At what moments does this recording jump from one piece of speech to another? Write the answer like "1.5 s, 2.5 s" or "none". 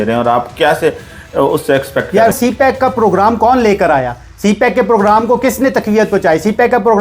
2.3 s